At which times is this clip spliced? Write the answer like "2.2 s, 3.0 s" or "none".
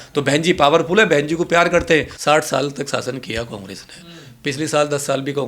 2.1 s